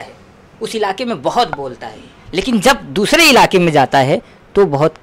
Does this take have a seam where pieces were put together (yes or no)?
no